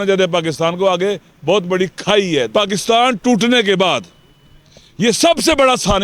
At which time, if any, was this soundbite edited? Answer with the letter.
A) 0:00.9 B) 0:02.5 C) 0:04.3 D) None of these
B